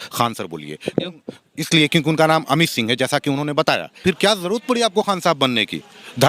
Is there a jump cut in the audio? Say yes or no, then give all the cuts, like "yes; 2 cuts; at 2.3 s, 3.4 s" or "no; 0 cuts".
yes; 1 cut; at 4.0 s